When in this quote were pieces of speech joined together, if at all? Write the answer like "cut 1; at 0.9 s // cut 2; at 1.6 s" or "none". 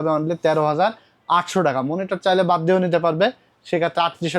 none